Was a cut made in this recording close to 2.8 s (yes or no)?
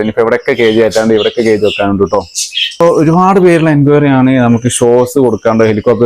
yes